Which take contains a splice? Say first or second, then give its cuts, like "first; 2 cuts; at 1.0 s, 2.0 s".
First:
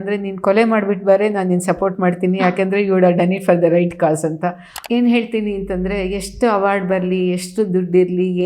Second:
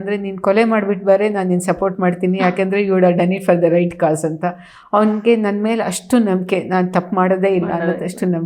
first; 1 cut; at 4.7 s